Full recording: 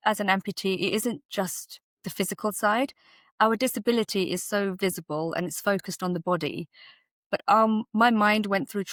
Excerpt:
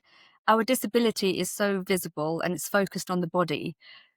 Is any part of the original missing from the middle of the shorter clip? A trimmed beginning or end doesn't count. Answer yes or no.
no